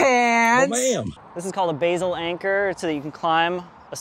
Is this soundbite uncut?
no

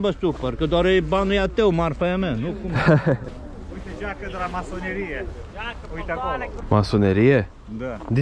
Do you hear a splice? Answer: yes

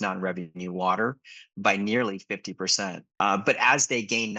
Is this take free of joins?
no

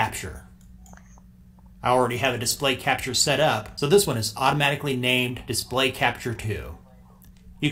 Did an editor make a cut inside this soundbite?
yes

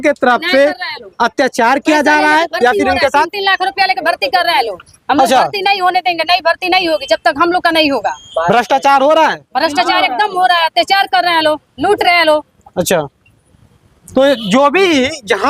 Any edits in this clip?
no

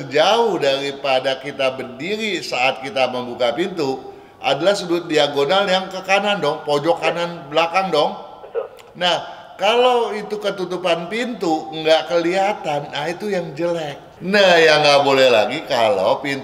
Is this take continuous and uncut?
no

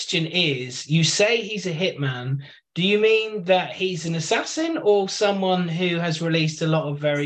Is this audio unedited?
yes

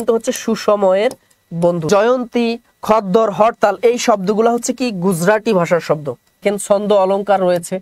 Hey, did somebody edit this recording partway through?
yes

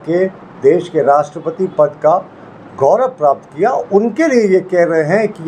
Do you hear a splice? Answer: no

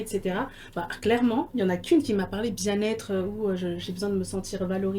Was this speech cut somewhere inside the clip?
no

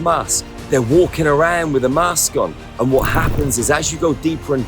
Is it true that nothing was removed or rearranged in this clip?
no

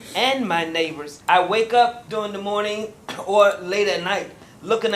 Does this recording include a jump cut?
yes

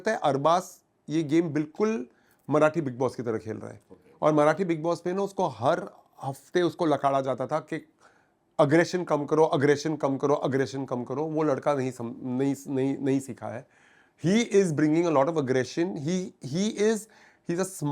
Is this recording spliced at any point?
no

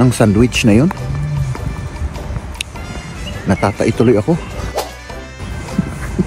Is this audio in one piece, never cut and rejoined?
no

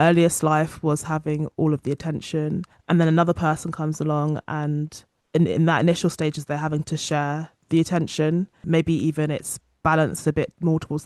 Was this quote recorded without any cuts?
yes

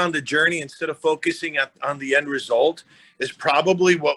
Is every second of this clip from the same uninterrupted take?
yes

